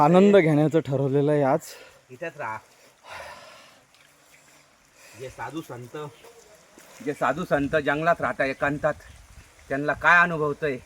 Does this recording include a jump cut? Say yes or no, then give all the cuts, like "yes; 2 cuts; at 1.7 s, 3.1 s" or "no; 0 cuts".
no; 0 cuts